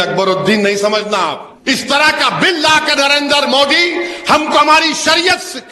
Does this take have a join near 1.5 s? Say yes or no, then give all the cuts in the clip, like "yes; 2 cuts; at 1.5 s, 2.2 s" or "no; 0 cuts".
yes; 1 cut; at 1.5 s